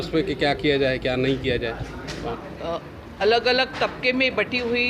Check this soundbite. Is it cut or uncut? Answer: cut